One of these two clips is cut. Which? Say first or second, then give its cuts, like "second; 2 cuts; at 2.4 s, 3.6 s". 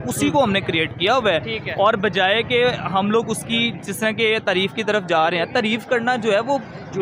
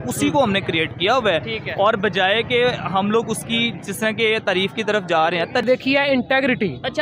second; 1 cut; at 5.6 s